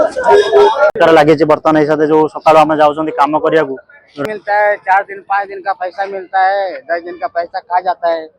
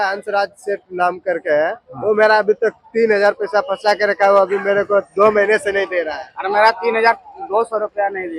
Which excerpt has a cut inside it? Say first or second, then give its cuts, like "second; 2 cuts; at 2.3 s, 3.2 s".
first; 2 cuts; at 1.0 s, 4.2 s